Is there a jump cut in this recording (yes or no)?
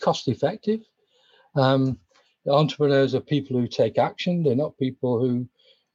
no